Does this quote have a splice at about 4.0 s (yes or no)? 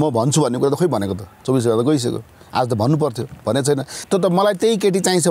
yes